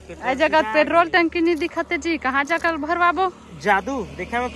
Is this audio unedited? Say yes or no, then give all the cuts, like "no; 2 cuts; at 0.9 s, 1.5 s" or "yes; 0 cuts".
yes; 0 cuts